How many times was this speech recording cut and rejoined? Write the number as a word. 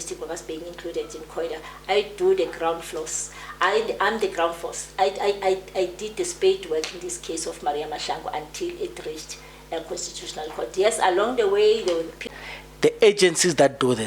one